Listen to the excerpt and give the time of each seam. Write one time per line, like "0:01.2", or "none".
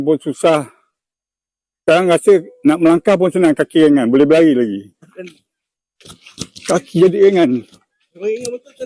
none